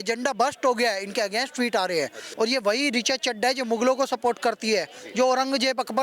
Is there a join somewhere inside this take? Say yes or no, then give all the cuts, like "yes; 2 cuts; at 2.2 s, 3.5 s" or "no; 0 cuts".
yes; 1 cut; at 2.2 s